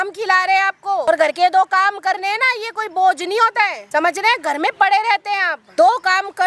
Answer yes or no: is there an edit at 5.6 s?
yes